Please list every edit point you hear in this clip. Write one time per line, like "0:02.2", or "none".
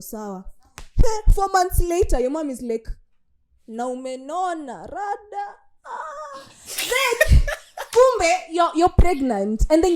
none

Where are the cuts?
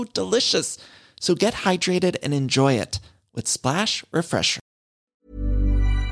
0:05.2

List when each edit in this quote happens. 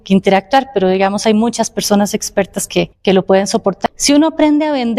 0:02.9
0:03.8

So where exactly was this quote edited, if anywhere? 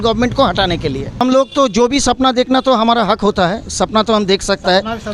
0:01.2

